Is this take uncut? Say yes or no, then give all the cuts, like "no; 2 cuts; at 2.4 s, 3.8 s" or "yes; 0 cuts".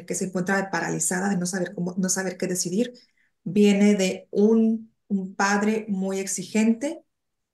yes; 0 cuts